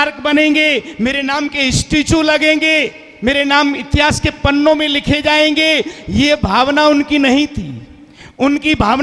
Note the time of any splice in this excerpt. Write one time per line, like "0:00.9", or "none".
none